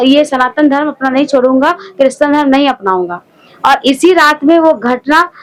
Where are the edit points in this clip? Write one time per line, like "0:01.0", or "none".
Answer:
none